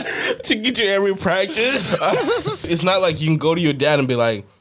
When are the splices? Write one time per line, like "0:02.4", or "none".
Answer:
0:02.7